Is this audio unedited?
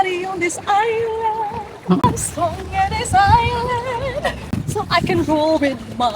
no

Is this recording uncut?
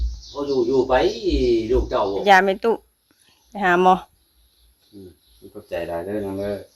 no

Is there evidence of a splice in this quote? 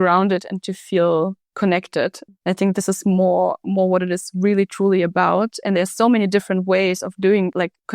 yes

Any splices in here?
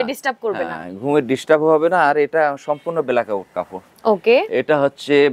no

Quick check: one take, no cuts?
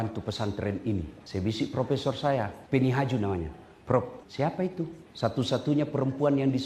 no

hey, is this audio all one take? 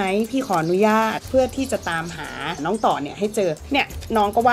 no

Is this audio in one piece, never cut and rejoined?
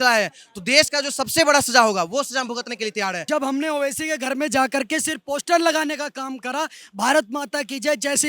no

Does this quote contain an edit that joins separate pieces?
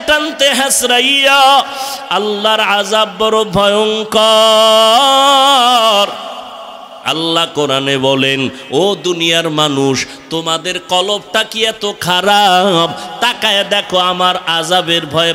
no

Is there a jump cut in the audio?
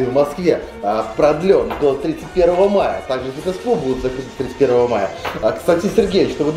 no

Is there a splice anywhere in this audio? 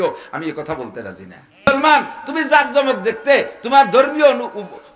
yes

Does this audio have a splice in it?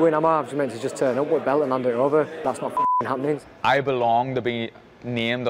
yes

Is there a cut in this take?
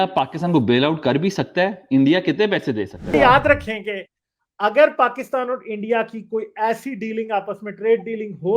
yes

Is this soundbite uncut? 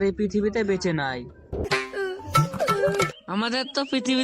no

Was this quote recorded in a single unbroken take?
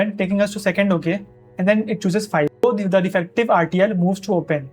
no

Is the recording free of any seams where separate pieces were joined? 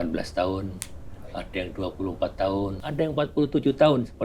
no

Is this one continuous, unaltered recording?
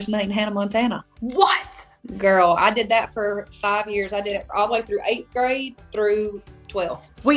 yes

